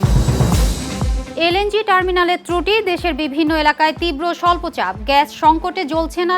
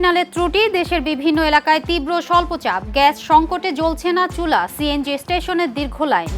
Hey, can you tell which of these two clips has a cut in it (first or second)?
first